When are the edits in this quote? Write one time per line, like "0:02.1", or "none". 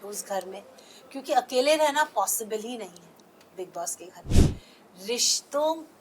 none